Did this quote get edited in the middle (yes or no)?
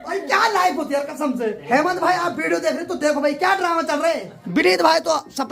yes